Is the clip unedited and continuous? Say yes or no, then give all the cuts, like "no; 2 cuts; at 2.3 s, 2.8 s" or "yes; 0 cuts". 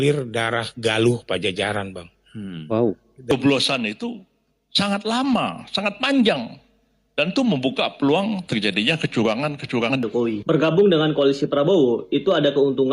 no; 2 cuts; at 3.3 s, 9.9 s